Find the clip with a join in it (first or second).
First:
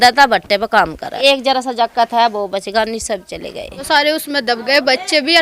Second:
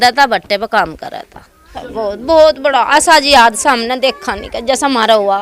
first